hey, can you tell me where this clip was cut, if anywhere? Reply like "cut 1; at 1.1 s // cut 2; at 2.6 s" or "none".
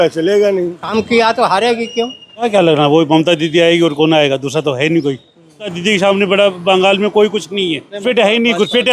cut 1; at 0.8 s // cut 2; at 2.4 s // cut 3; at 5.8 s // cut 4; at 8.0 s